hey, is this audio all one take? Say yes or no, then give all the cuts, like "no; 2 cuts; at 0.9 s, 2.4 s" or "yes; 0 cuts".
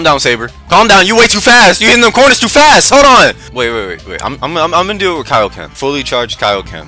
no; 1 cut; at 3.4 s